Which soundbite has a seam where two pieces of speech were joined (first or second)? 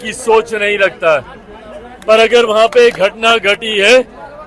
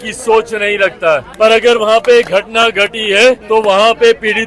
second